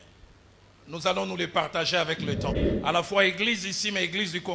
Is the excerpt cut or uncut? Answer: cut